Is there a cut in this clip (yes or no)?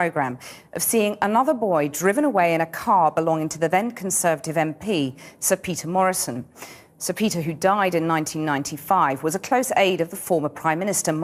yes